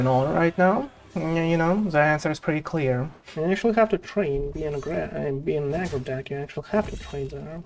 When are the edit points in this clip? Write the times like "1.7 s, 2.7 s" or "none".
3.2 s